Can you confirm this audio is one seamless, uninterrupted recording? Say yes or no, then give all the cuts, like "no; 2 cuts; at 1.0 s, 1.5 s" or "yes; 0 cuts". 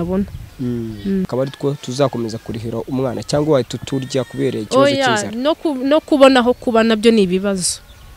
no; 1 cut; at 1.3 s